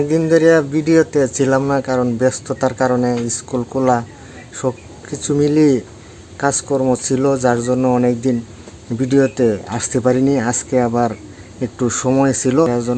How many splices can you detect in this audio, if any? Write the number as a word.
zero